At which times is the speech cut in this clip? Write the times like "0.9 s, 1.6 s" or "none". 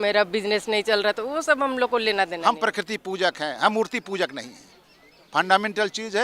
2.4 s